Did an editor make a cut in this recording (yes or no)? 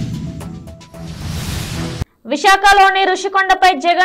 yes